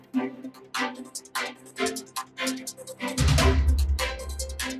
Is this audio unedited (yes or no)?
no